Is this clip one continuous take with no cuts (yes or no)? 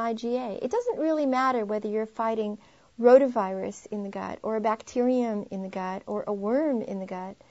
no